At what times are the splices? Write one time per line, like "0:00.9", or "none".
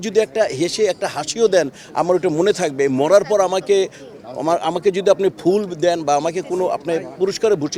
none